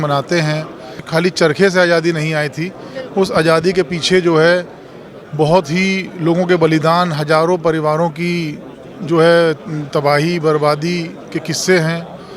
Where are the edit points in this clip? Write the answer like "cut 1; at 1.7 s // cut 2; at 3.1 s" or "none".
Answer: cut 1; at 1.1 s

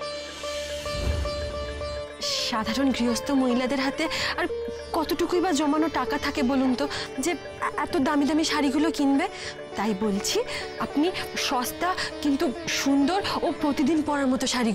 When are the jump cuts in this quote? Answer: cut 1; at 2.4 s

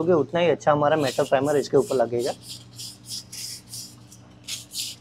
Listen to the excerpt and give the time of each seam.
none

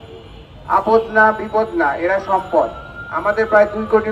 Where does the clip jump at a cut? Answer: none

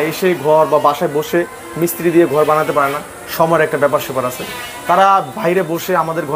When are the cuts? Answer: none

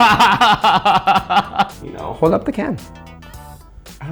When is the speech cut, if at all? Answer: cut 1; at 1.8 s

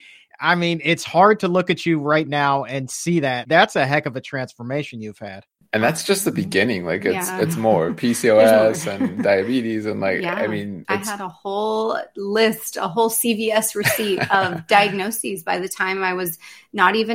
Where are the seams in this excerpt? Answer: cut 1; at 3.4 s // cut 2; at 5.5 s // cut 3; at 10.8 s

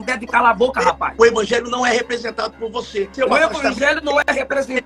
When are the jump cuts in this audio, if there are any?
cut 1; at 1.1 s // cut 2; at 3.1 s

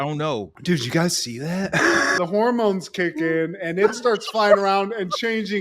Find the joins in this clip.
cut 1; at 2.2 s

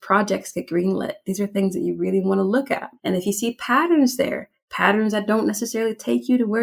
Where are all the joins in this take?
cut 1; at 2.9 s

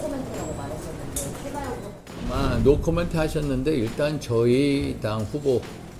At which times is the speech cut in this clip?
cut 1; at 2.0 s

